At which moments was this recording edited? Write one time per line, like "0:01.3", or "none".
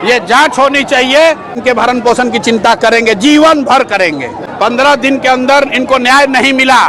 0:01.6
0:04.4